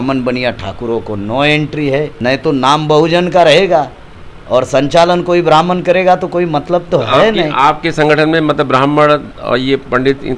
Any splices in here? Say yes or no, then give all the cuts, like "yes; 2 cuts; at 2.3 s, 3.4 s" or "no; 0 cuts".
no; 0 cuts